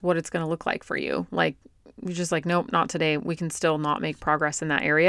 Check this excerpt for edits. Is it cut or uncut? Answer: uncut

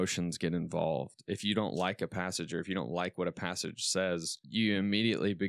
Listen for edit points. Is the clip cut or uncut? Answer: cut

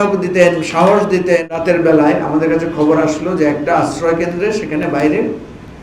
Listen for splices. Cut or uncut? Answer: cut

